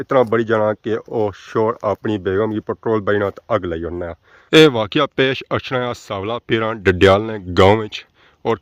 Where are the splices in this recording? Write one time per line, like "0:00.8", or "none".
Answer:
none